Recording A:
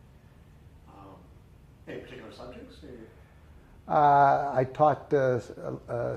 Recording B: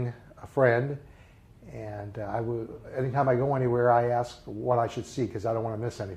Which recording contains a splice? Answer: B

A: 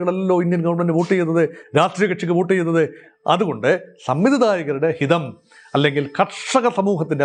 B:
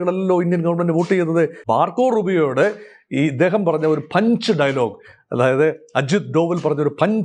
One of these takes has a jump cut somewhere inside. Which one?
B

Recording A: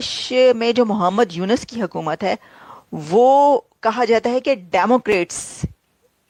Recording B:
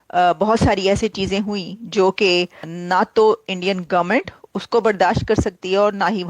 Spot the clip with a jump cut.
B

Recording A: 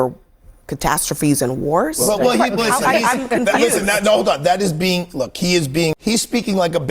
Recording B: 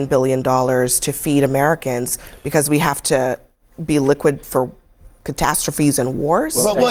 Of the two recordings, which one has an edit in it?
A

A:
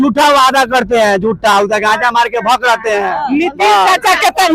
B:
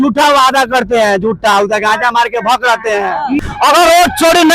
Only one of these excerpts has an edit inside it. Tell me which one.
B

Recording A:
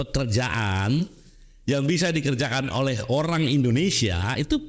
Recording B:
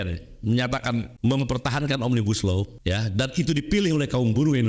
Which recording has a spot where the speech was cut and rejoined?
B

